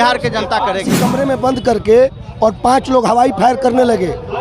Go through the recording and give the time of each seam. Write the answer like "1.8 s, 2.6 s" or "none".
1.0 s